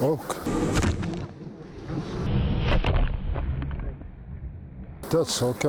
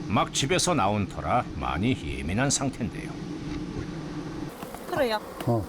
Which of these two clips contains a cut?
second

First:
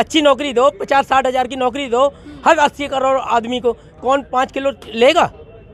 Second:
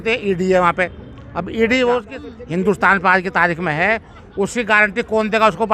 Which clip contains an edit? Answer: second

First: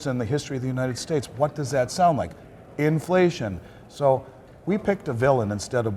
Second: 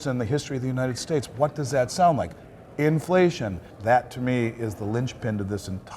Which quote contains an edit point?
second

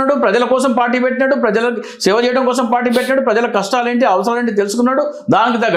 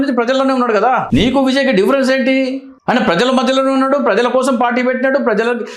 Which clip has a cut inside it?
second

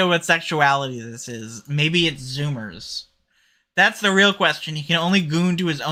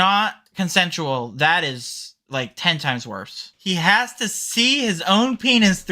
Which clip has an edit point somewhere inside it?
second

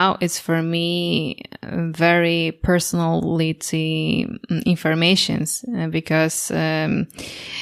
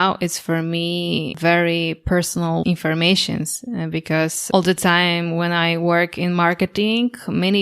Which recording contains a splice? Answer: second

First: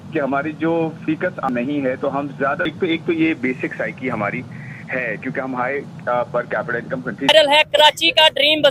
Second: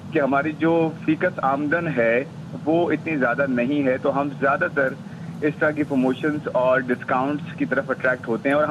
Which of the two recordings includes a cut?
first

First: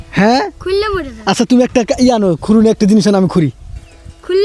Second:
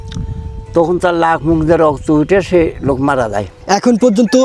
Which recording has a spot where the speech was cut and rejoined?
second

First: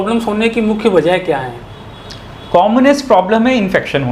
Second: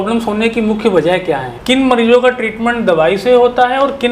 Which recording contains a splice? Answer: second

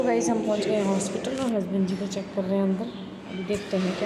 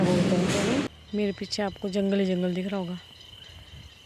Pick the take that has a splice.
second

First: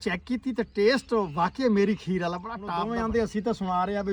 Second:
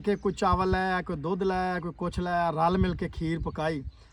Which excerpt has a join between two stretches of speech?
first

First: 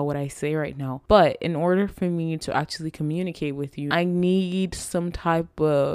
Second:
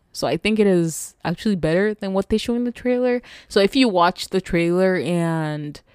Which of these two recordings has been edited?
first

